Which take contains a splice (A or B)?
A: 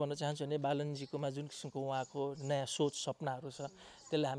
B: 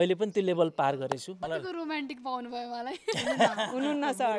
B